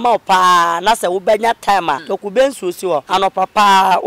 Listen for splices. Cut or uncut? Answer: cut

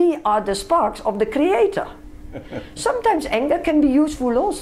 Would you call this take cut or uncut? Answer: cut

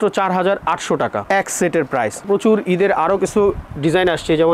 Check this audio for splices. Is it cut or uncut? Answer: cut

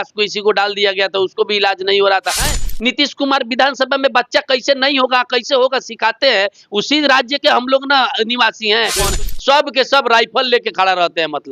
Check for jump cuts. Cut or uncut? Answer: cut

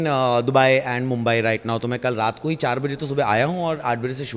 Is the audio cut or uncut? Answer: uncut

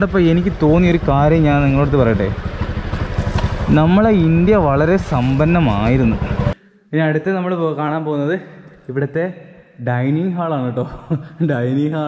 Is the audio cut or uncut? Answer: cut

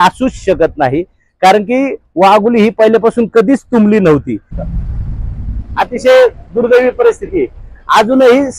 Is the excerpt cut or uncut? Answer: cut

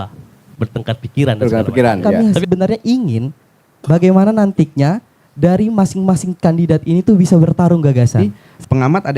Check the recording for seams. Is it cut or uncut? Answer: cut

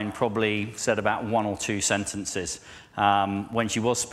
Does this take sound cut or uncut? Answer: uncut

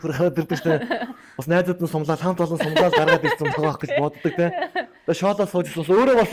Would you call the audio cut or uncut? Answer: uncut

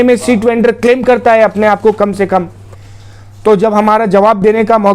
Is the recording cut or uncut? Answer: cut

